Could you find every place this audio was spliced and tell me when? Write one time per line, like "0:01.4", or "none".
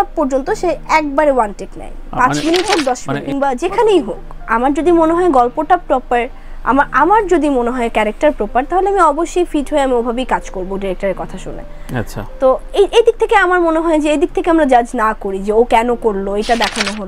0:03.2